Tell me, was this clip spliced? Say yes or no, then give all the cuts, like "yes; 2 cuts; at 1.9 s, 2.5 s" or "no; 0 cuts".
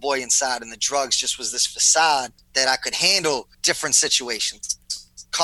yes; 2 cuts; at 2.4 s, 3.5 s